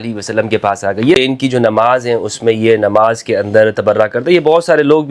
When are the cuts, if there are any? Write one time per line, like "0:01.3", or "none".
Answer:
0:01.1